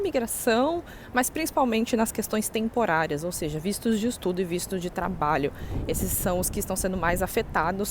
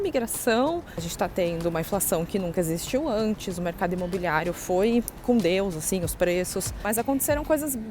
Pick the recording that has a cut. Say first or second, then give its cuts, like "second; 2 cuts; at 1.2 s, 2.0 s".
second; 2 cuts; at 1.0 s, 6.8 s